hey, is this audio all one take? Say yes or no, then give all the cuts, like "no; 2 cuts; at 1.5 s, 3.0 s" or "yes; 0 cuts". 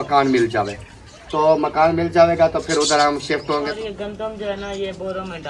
no; 1 cut; at 3.7 s